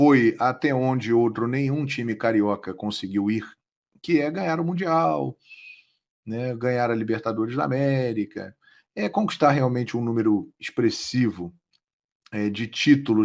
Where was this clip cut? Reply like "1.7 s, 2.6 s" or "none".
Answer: none